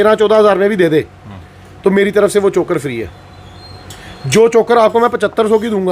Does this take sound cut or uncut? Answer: uncut